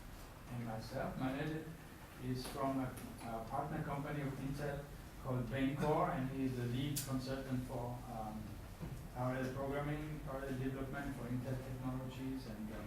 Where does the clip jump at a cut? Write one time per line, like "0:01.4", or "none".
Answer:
0:11.9

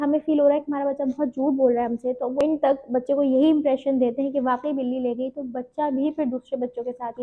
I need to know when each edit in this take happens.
0:02.4

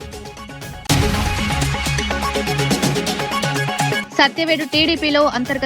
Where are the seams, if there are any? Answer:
0:00.8
0:02.2
0:03.6

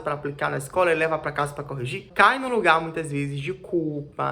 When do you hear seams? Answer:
0:02.1

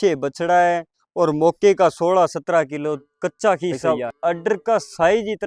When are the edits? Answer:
0:03.8

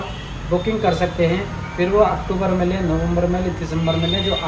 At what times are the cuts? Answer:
none

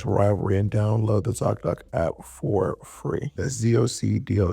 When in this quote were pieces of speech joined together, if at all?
0:03.4

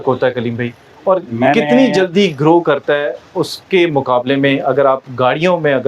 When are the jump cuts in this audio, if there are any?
none

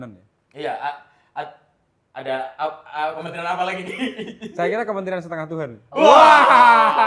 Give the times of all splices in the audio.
none

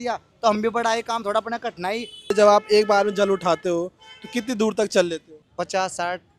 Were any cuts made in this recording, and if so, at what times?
0:02.3
0:05.4

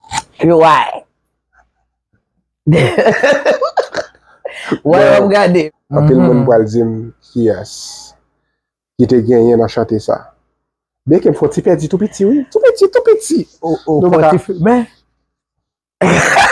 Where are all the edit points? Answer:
0:05.6

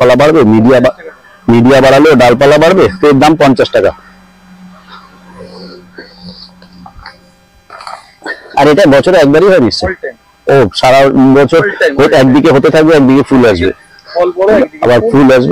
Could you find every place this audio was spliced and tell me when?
none

